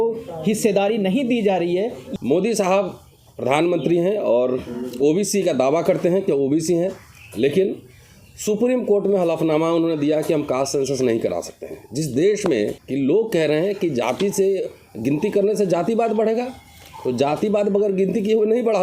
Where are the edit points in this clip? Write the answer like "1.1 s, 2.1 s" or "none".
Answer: 2.0 s, 12.8 s